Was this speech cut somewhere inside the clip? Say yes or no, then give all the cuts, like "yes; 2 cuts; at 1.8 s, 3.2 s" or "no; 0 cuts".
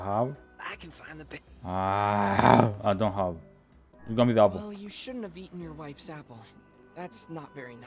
yes; 1 cut; at 3.9 s